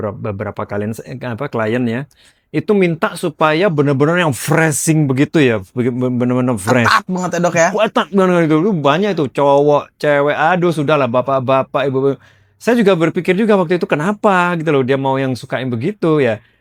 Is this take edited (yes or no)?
no